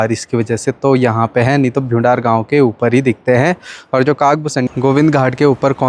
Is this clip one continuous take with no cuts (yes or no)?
no